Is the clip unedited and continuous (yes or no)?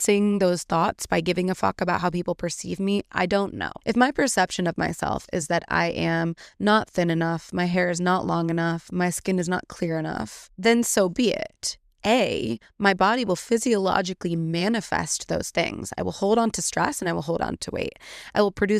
no